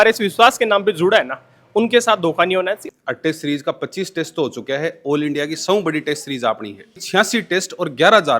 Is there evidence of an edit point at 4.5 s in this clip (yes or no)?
no